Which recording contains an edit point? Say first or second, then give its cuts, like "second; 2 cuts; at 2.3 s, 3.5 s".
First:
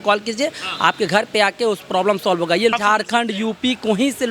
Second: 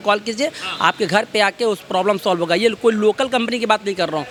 first; 1 cut; at 2.8 s